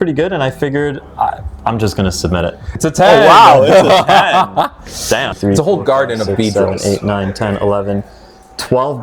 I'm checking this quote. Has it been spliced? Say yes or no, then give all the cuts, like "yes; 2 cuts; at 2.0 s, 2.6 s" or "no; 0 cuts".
yes; 2 cuts; at 2.8 s, 5.4 s